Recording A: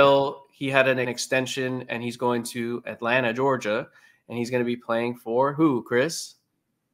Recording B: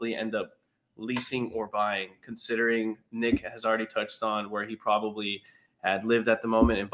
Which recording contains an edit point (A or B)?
A